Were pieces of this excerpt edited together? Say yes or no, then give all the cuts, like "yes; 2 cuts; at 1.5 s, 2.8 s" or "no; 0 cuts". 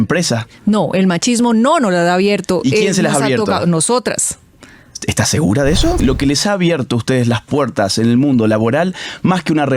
yes; 1 cut; at 6.0 s